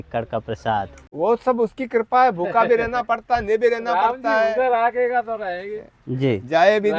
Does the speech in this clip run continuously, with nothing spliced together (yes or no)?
no